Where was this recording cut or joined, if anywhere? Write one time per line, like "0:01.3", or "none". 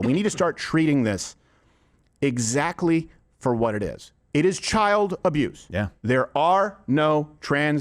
none

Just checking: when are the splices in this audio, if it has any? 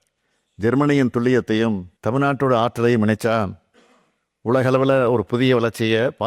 none

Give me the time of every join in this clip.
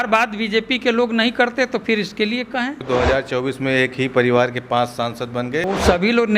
0:02.8
0:05.7

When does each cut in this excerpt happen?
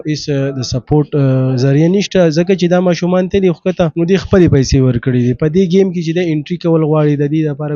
0:03.9

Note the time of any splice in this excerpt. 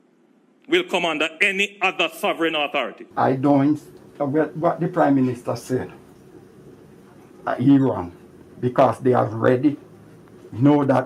0:03.0

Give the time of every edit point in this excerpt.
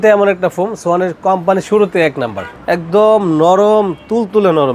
0:02.5

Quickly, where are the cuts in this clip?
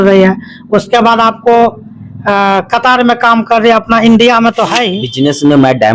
0:05.0

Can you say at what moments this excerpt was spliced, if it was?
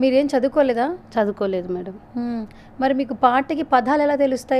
none

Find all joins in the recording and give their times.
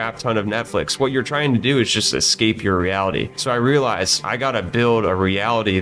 0:03.3
0:04.2

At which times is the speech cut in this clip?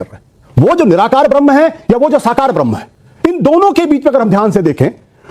0:03.0

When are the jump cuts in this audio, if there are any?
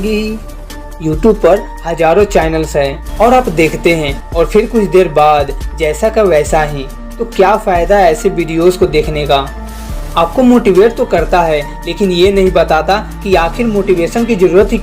0:03.0

